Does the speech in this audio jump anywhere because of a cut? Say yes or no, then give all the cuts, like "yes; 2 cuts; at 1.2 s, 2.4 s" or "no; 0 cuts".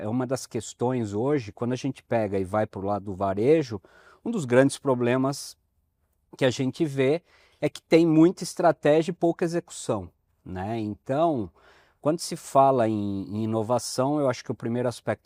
no; 0 cuts